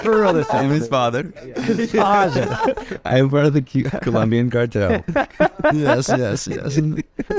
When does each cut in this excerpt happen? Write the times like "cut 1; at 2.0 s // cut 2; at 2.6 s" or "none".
none